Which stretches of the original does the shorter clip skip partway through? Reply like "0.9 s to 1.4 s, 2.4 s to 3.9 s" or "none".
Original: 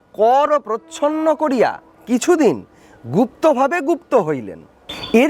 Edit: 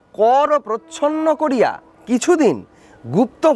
none